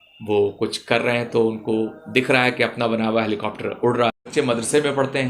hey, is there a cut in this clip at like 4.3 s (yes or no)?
yes